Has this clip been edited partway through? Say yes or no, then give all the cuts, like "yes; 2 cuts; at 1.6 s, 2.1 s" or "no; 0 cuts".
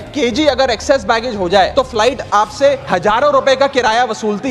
yes; 2 cuts; at 1.7 s, 2.8 s